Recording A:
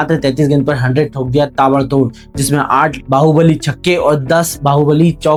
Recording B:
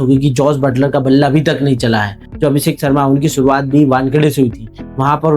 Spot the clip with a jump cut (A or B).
B